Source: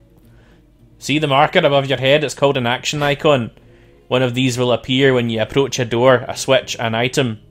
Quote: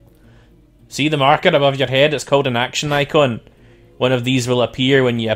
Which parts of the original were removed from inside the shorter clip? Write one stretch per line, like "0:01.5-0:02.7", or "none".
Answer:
0:00.9-0:01.0